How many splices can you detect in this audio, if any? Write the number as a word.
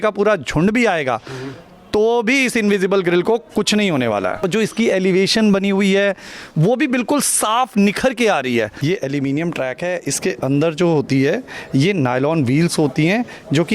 two